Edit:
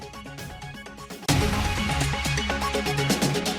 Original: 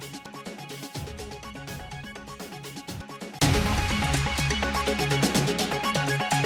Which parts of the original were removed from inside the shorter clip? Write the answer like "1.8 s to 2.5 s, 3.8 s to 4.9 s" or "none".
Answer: 2.6 s to 3.4 s